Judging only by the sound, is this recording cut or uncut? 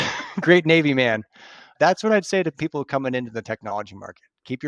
cut